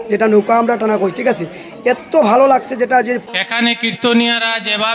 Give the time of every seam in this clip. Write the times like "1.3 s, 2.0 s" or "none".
3.2 s